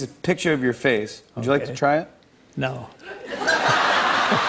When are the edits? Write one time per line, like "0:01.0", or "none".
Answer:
none

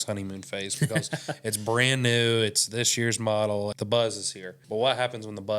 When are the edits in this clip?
0:03.7
0:04.6

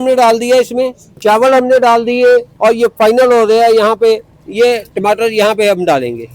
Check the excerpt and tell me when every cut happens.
0:01.0
0:02.5

